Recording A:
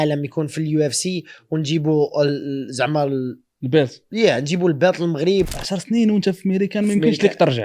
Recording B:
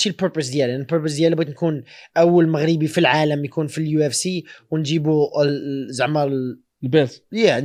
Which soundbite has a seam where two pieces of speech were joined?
A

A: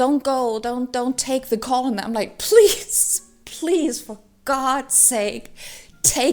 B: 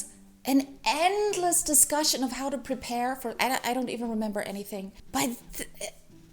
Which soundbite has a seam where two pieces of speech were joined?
B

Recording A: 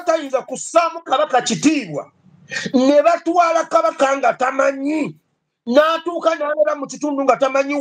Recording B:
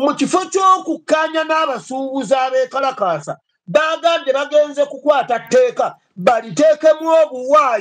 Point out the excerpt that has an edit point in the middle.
A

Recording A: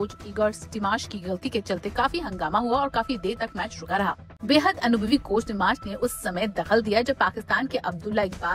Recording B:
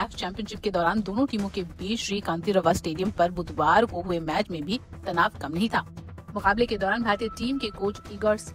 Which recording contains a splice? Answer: A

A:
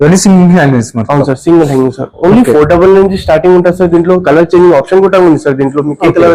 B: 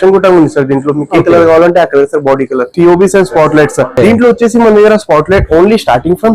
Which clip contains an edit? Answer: B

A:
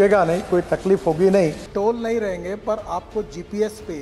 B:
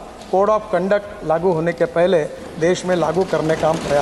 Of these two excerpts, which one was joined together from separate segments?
A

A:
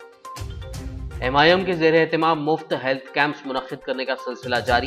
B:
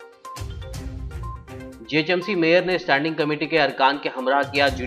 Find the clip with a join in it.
A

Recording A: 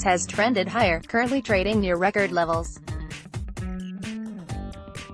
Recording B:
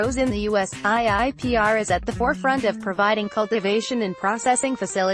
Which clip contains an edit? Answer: A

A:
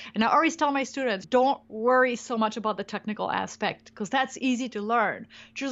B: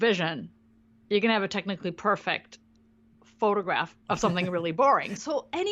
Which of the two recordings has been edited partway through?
B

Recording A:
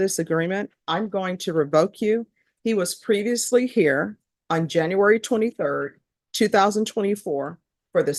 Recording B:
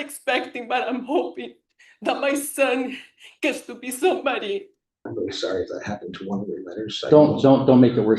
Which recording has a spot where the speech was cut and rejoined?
B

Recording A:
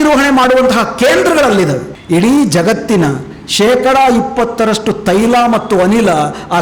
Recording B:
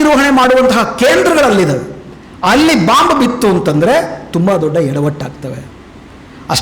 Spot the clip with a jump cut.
A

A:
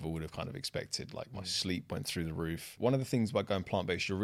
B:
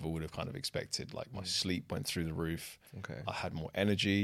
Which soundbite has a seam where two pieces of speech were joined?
A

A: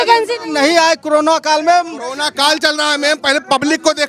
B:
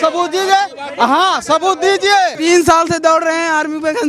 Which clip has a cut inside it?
B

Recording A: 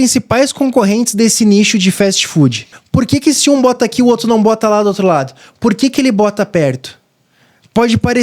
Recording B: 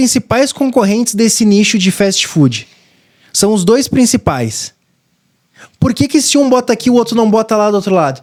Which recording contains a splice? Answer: A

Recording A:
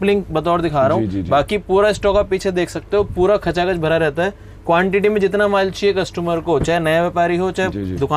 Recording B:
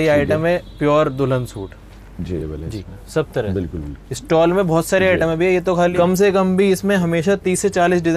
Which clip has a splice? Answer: B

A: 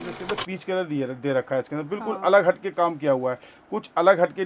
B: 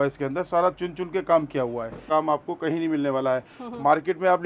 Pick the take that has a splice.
B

